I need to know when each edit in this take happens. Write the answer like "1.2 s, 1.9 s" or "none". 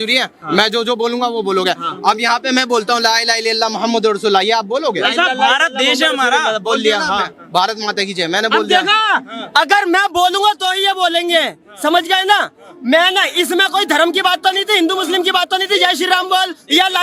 none